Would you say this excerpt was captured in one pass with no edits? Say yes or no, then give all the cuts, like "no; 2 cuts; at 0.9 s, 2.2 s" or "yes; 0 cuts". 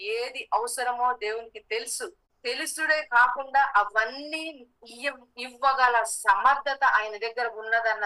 no; 1 cut; at 2.1 s